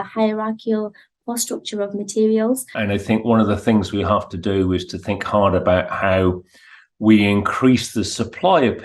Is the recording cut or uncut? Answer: cut